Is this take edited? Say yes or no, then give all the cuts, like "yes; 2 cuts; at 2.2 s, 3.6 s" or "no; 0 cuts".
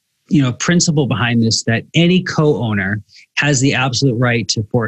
no; 0 cuts